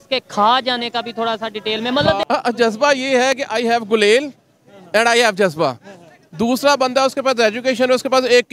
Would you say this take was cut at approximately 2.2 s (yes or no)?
yes